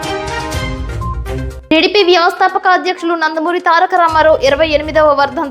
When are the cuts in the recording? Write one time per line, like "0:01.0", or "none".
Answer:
0:01.5